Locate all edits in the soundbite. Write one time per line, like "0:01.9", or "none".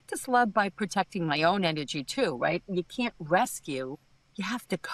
none